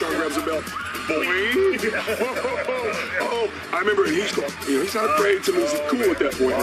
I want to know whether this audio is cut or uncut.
uncut